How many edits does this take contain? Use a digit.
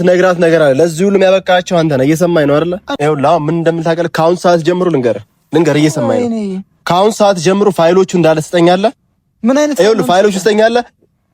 1